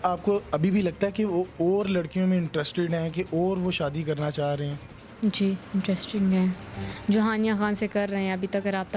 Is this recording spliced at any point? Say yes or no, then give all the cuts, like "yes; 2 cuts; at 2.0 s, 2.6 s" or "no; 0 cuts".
no; 0 cuts